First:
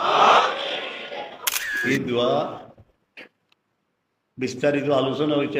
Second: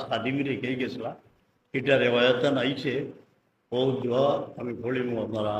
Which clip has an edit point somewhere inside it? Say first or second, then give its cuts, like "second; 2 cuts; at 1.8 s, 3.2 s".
first; 1 cut; at 1.8 s